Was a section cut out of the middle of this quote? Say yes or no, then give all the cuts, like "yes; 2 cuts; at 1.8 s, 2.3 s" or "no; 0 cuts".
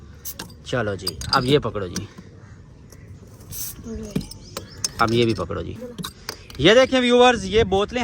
no; 0 cuts